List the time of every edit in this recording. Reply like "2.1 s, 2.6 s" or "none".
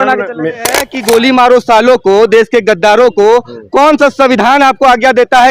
0.9 s